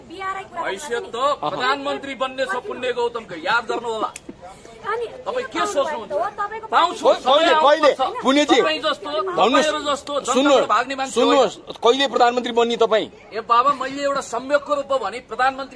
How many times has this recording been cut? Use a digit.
0